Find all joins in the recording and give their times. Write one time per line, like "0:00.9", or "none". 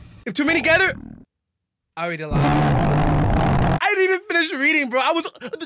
none